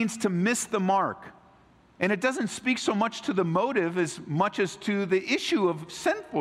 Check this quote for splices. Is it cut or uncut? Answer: uncut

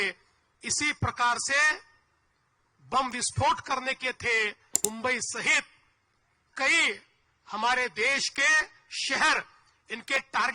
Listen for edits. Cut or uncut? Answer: cut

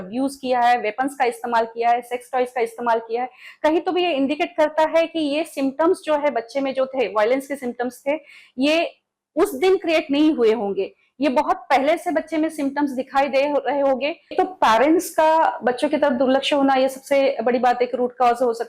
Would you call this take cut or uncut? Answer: cut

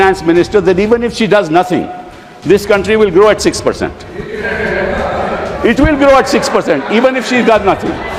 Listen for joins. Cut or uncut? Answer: uncut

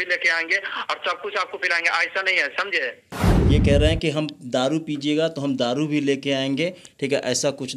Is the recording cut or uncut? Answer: uncut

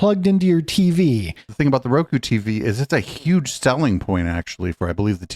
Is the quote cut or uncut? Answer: cut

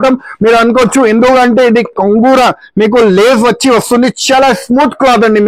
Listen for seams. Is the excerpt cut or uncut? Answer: uncut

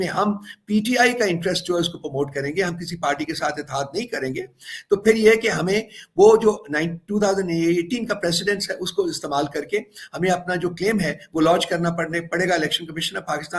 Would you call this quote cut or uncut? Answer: uncut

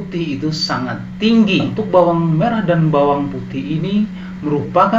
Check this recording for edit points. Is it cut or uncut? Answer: cut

